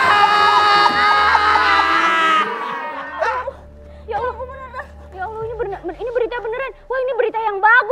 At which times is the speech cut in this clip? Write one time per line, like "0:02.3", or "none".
0:02.9